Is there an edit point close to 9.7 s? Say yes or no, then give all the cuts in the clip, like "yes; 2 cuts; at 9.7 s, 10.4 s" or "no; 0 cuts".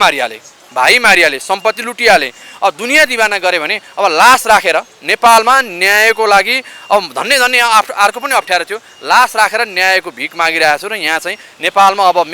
no; 0 cuts